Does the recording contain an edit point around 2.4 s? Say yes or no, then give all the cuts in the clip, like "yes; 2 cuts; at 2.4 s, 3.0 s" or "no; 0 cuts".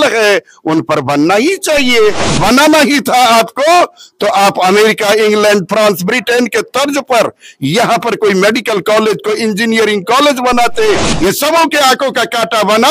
yes; 2 cuts; at 2.4 s, 11.1 s